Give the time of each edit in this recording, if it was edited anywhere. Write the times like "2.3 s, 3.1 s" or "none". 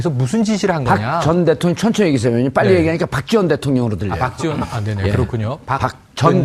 4.6 s